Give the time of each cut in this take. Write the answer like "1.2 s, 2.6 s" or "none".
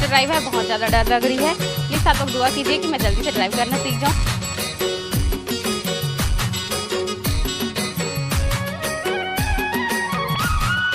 none